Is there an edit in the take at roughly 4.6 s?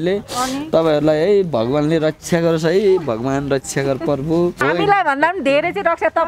yes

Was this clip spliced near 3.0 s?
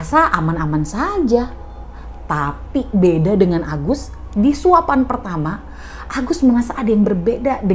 no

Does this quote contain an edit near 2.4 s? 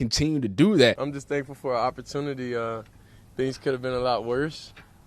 no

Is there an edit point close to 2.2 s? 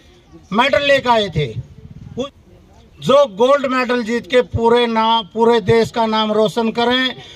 yes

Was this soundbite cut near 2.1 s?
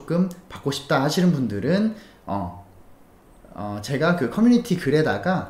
no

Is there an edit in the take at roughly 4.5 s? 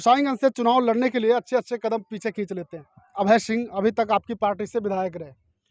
no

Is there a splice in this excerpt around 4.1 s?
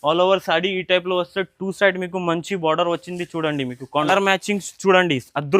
yes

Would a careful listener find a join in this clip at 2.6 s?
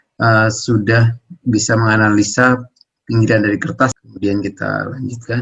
no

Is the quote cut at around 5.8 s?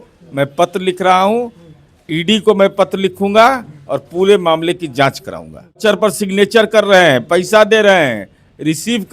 yes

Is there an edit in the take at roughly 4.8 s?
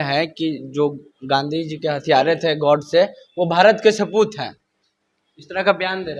no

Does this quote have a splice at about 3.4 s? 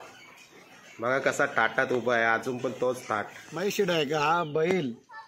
yes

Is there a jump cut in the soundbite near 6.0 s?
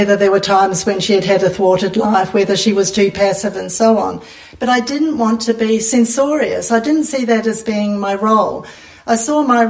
no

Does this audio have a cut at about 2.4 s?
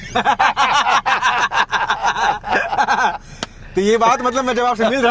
no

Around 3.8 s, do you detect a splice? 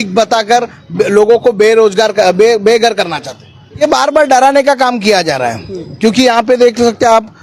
yes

